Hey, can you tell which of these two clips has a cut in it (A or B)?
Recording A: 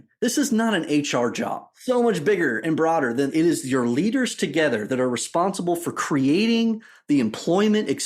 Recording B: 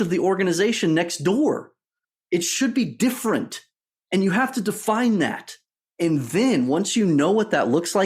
A